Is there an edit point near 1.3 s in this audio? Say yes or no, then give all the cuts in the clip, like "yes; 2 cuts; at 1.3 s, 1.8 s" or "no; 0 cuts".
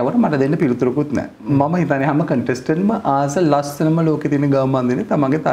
no; 0 cuts